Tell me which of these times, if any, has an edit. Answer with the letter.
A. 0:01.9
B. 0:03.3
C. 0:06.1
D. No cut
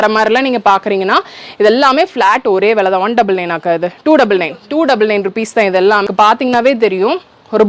C